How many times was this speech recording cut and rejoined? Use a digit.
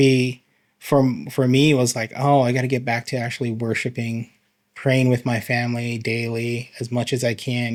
0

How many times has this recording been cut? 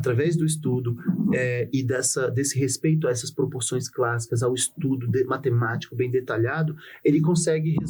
0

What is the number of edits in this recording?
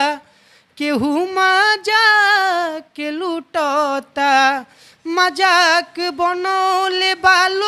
0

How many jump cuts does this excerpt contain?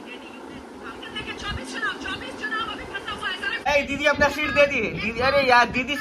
1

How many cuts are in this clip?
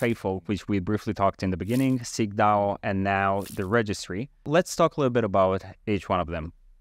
0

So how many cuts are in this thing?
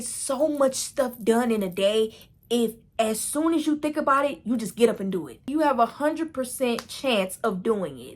2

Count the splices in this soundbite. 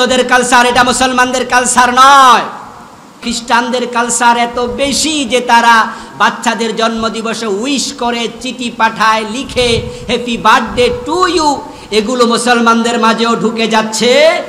1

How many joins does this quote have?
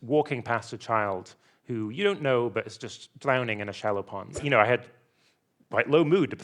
1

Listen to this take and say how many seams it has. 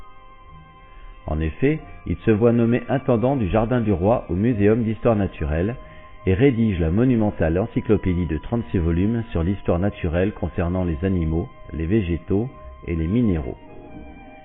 1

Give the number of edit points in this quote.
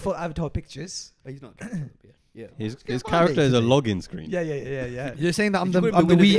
0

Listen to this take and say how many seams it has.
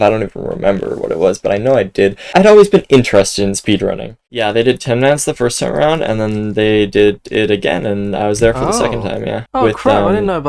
2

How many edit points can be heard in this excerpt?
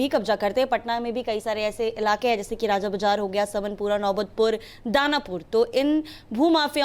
0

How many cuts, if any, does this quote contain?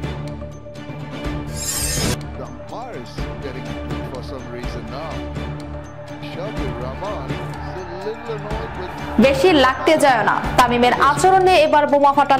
1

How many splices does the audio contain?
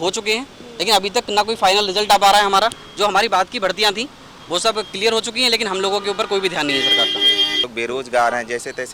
1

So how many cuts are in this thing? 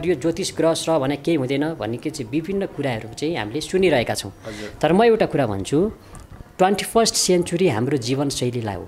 0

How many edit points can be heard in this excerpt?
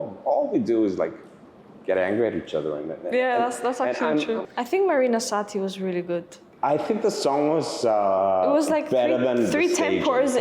1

